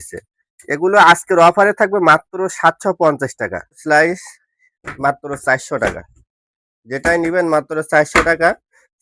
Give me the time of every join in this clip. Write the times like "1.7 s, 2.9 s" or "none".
3.8 s